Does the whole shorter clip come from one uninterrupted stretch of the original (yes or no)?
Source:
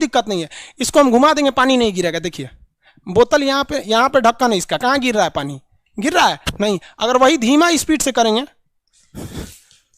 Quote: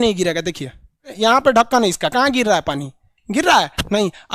no